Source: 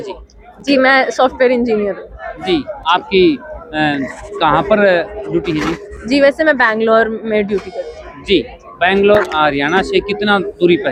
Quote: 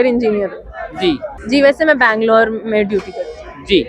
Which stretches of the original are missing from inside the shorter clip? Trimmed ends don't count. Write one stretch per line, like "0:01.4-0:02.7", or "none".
0:02.7-0:05.9